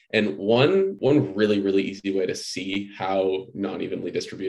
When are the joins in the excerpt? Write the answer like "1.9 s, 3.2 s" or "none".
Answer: 0.9 s